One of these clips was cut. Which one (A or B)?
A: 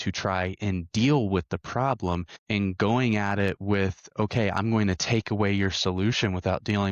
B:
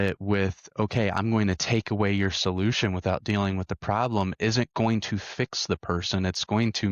A